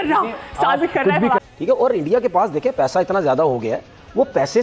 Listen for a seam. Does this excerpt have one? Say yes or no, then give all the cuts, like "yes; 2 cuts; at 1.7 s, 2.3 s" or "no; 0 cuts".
yes; 1 cut; at 1.5 s